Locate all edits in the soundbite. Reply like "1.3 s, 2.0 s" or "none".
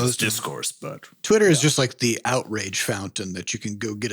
1.1 s